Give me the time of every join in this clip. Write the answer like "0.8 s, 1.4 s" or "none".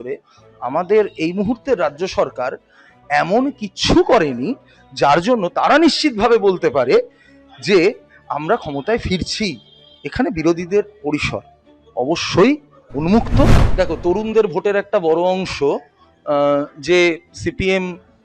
13.6 s